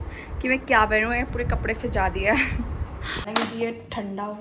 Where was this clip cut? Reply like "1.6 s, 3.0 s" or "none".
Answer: 3.3 s